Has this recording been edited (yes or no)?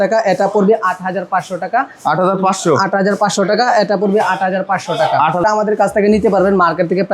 yes